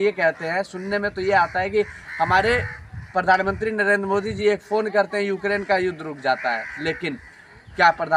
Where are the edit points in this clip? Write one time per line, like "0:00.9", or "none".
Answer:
none